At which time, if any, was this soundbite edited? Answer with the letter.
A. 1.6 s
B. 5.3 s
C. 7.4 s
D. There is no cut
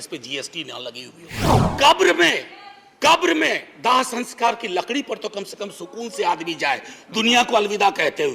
A